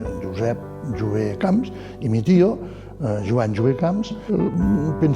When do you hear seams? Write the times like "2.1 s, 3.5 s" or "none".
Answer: 4.1 s